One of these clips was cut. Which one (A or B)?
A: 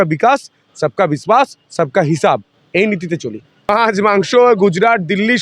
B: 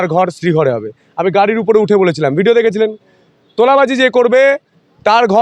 A